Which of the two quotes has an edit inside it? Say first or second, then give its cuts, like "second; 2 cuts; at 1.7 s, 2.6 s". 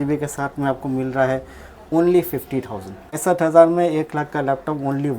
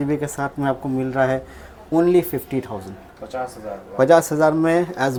first; 1 cut; at 3.2 s